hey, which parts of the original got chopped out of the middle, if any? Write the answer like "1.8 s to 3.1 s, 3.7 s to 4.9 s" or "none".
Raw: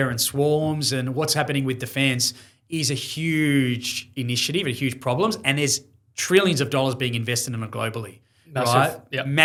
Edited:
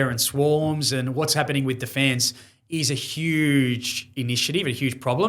none